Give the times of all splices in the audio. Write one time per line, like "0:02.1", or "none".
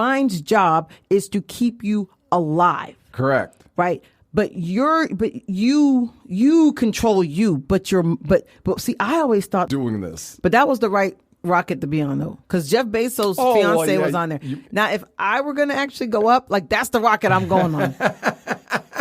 0:09.7